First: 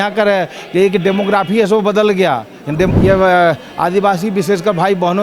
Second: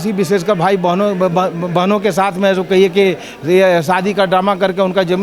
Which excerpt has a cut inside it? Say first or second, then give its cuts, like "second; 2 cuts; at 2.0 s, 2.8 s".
first; 1 cut; at 2.9 s